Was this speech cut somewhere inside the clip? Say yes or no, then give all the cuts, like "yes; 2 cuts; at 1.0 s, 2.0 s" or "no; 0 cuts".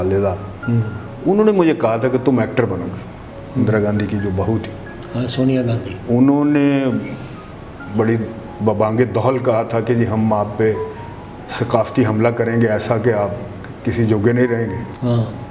yes; 1 cut; at 3.4 s